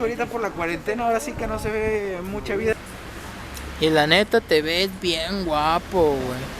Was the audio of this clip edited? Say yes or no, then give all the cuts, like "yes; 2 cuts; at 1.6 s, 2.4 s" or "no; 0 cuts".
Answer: yes; 1 cut; at 2.7 s